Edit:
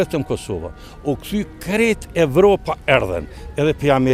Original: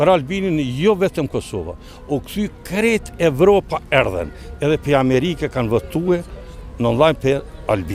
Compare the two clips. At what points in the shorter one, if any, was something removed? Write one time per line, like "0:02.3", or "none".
none